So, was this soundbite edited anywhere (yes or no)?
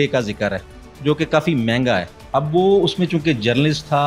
yes